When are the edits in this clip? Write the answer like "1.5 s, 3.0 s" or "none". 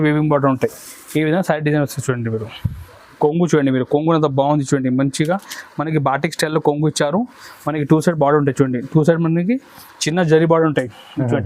3.2 s